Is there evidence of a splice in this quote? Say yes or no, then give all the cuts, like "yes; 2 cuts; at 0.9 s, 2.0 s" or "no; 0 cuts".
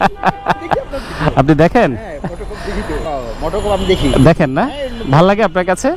yes; 1 cut; at 3.0 s